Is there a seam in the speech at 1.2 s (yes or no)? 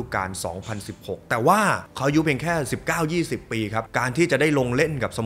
no